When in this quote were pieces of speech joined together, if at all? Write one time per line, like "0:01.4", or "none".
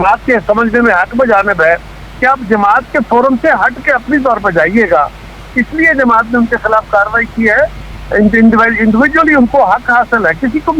none